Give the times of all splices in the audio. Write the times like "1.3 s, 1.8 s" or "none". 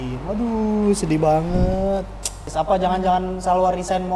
2.4 s